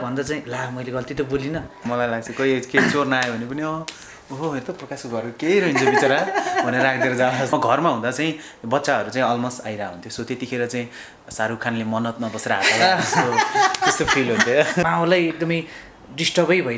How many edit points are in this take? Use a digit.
3